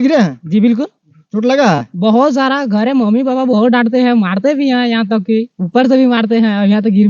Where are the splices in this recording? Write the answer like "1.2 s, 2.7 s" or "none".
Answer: none